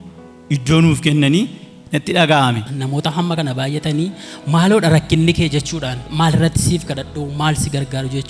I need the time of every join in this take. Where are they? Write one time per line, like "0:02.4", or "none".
0:02.6